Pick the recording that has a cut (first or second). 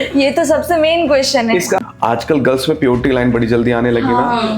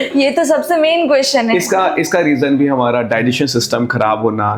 first